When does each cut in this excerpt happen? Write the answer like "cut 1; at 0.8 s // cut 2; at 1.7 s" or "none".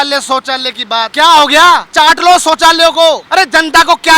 cut 1; at 1.1 s // cut 2; at 1.9 s // cut 3; at 3.2 s